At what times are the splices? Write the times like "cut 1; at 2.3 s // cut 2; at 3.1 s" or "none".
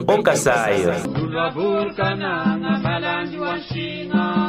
cut 1; at 1.0 s